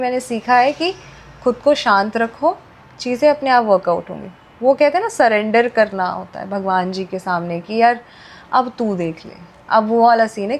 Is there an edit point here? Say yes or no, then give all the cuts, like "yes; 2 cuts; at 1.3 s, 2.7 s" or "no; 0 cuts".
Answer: no; 0 cuts